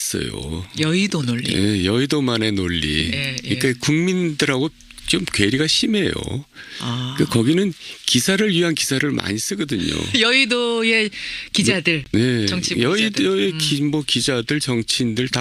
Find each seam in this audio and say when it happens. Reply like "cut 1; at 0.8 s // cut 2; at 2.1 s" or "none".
none